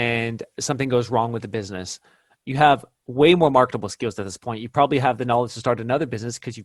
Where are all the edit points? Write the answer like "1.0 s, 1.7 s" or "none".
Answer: none